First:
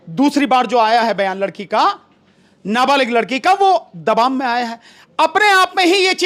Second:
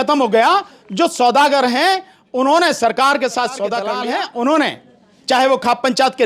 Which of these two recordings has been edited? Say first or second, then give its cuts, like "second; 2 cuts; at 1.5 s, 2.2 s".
second; 1 cut; at 4.0 s